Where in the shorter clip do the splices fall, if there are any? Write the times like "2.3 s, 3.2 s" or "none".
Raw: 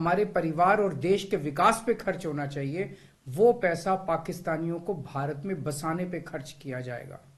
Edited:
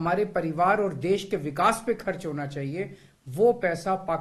none